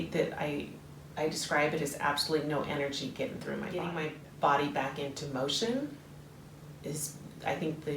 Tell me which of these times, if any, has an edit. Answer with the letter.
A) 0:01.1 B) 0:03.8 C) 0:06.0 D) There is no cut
B